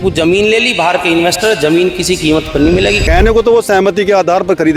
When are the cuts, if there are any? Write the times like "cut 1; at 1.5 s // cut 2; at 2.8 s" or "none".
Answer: cut 1; at 3.0 s